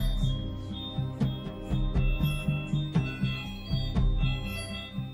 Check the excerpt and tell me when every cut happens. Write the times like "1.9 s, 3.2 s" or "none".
none